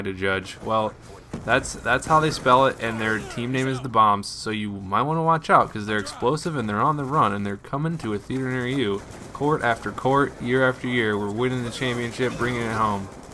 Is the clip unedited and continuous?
no; 1 cut; at 5.8 s

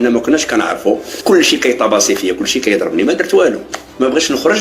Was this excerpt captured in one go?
no; 1 cut; at 1.1 s

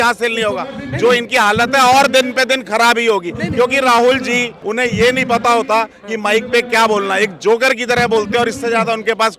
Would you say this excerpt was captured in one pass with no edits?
no; 1 cut; at 4.6 s

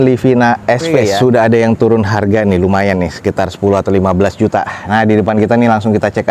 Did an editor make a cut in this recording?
yes; 1 cut; at 1.0 s

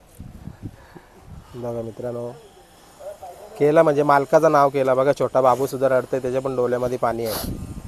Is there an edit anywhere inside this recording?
no; 0 cuts

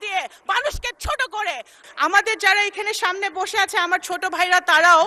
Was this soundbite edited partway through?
yes; 1 cut; at 1.8 s

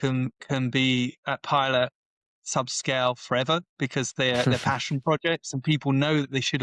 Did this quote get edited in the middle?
no; 0 cuts

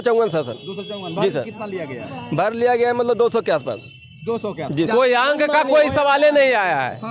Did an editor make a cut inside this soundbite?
yes; 1 cut; at 4.9 s

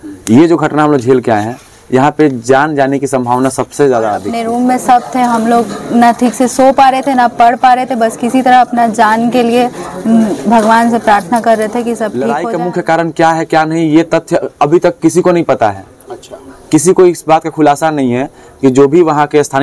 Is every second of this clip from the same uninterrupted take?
no; 2 cuts; at 4.3 s, 12.3 s

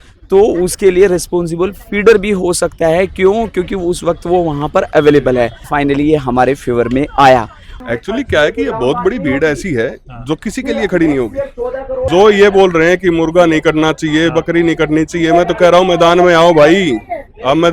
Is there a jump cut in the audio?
yes; 3 cuts; at 5.6 s, 7.7 s, 12.1 s

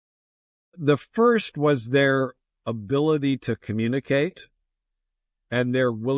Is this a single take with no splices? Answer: yes; 0 cuts

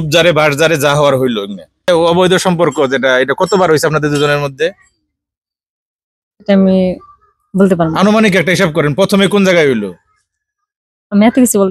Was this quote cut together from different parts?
yes; 1 cut; at 1.9 s

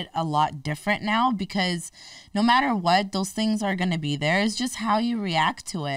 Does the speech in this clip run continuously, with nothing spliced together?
yes; 0 cuts

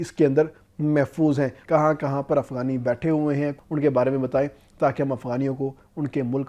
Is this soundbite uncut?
no; 2 cuts; at 1.6 s, 3.6 s

